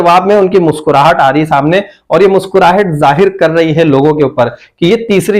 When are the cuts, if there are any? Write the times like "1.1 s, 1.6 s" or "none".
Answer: none